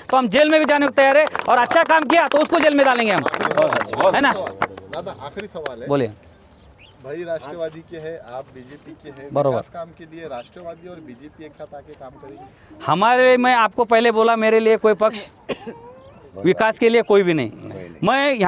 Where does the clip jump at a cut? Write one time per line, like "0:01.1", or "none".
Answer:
none

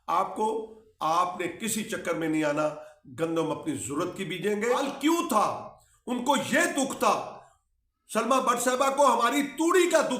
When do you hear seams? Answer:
0:04.8

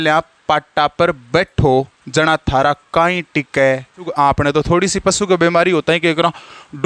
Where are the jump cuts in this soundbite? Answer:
0:04.0

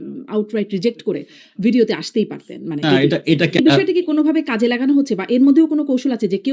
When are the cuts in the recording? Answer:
0:03.6

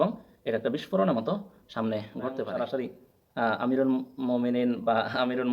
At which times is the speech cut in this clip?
0:02.5

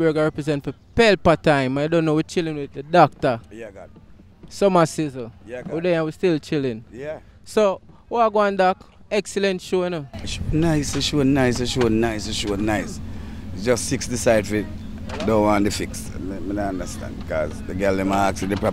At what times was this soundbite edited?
none

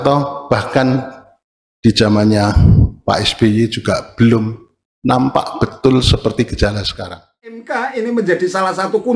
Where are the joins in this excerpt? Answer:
0:07.6

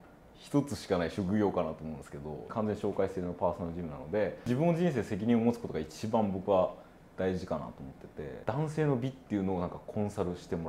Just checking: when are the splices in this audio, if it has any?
0:02.4
0:04.5
0:08.4

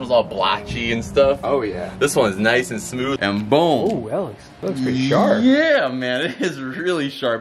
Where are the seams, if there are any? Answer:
0:03.1

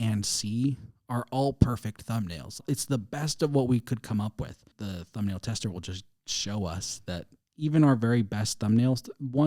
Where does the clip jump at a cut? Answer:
0:02.6
0:04.7

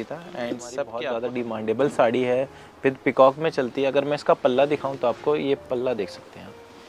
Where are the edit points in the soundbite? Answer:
0:01.0

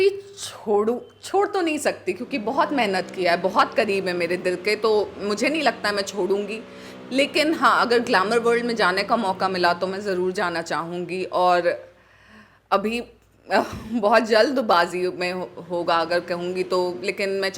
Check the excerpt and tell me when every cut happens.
none

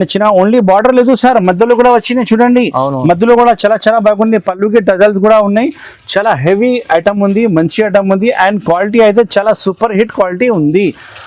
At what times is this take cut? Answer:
none

